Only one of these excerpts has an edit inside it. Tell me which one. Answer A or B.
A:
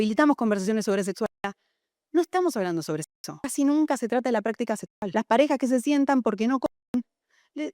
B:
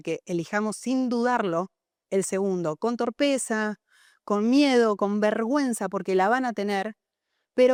A